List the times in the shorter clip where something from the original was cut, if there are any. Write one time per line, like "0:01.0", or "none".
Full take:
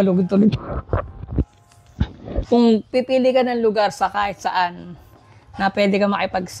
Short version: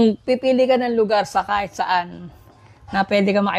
none